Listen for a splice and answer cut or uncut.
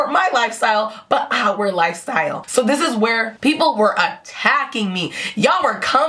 uncut